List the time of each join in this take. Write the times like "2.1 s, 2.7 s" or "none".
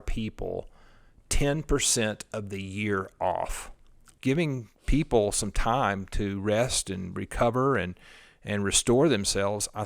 4.0 s